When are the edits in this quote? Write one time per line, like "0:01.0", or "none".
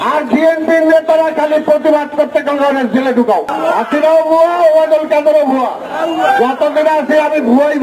0:03.5